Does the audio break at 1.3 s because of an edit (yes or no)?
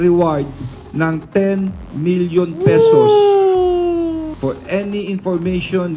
no